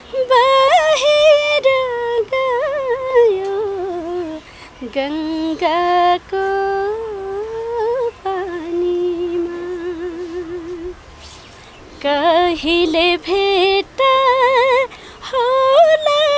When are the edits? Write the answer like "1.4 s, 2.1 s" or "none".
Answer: none